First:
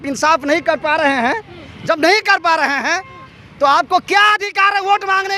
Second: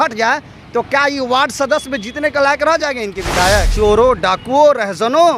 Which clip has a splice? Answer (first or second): second